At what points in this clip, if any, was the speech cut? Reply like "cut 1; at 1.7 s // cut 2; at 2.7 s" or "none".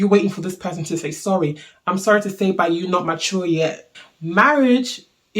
cut 1; at 3.9 s